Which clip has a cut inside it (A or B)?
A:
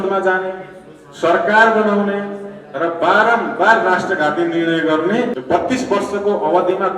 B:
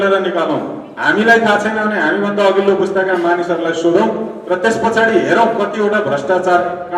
A